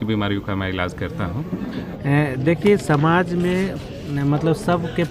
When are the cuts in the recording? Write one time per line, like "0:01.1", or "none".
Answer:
0:01.9